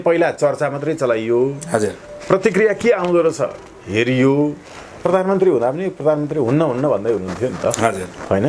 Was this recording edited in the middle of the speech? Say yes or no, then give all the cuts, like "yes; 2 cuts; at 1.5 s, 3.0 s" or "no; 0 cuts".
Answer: yes; 1 cut; at 5.0 s